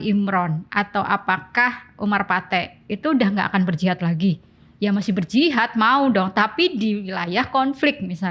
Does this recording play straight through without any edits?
yes; 0 cuts

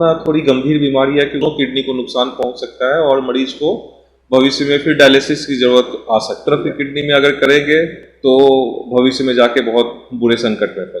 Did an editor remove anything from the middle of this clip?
yes; 2 cuts; at 1.4 s, 6.4 s

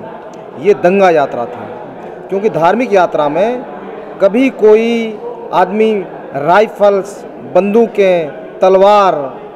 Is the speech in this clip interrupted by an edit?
no; 0 cuts

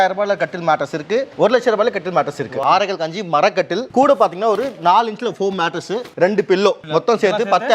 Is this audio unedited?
no; 4 cuts; at 1.3 s, 2.5 s, 6.1 s, 6.8 s

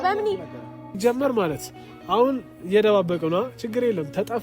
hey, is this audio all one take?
no; 1 cut; at 0.9 s

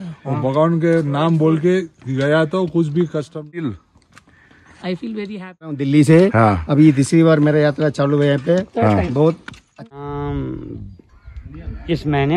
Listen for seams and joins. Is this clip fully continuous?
no; 3 cuts; at 3.7 s, 5.8 s, 9.9 s

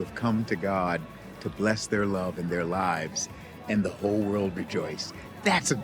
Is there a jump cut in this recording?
no; 0 cuts

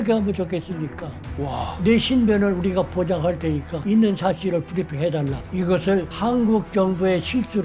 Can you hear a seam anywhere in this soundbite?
yes; 3 cuts; at 3.7 s, 5.4 s, 6.1 s

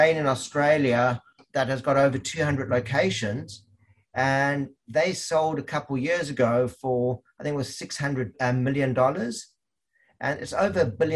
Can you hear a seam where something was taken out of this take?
yes; 2 cuts; at 1.4 s, 8.3 s

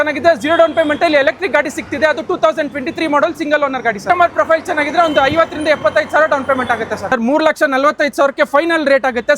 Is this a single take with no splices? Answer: no; 2 cuts; at 4.0 s, 7.1 s

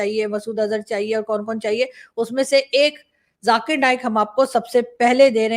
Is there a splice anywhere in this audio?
no; 0 cuts

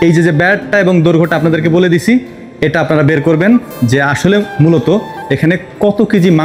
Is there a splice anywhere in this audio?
no; 0 cuts

